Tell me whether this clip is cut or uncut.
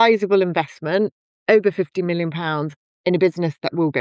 uncut